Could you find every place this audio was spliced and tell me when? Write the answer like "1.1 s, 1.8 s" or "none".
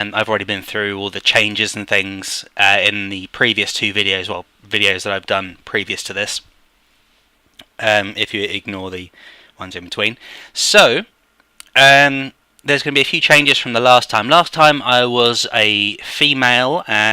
12.2 s